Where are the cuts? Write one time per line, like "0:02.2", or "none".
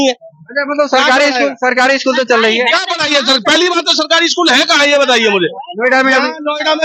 none